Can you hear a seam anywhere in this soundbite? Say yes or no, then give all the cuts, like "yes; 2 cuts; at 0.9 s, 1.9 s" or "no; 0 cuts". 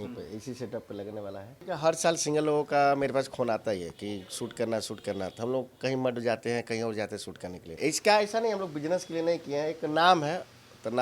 yes; 2 cuts; at 1.5 s, 7.7 s